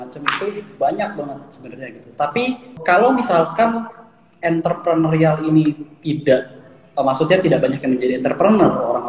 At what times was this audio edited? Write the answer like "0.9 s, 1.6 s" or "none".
2.8 s